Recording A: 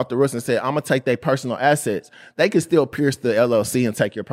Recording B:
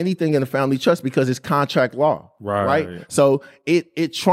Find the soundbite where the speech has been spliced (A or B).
B